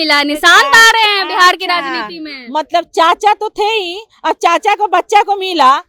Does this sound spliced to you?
no; 0 cuts

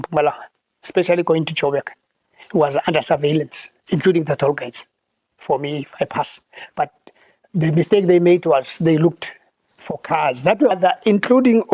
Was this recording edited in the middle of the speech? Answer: yes; 1 cut; at 10.7 s

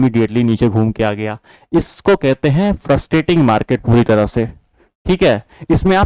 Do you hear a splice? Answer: no; 0 cuts

